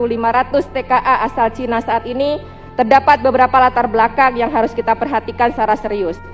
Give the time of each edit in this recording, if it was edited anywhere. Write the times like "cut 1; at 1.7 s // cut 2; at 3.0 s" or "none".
none